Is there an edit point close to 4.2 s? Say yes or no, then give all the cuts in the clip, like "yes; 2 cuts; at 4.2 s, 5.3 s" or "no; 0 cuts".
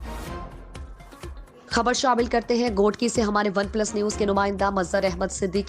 no; 1 cut; at 1.0 s